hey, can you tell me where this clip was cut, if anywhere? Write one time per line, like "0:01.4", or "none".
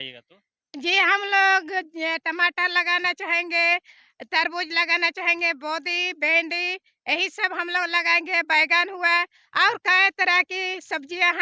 none